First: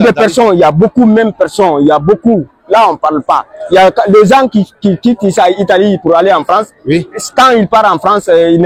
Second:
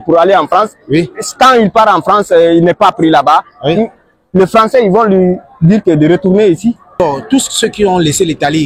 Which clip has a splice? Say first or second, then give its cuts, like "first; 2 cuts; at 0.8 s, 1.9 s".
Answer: second; 1 cut; at 7.0 s